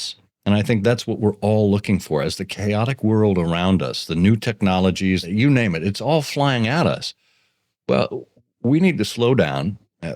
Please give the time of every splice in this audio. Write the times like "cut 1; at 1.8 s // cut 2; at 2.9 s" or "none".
cut 1; at 5.2 s